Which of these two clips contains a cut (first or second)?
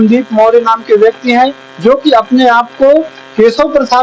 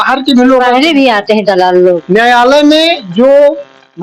second